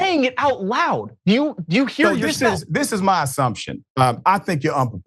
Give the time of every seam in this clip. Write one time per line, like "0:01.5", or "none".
0:01.4